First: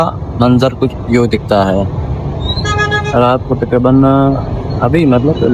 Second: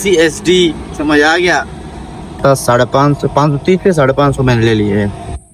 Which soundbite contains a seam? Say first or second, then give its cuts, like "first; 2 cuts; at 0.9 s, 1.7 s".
second; 1 cut; at 2.4 s